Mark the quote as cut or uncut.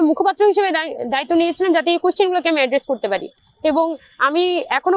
uncut